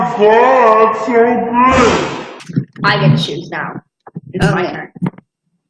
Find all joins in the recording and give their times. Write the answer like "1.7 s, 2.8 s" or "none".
2.3 s